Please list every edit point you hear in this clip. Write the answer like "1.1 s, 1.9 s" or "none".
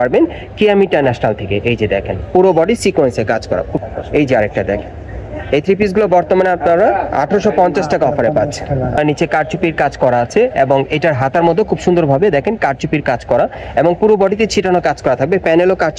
3.8 s, 9.0 s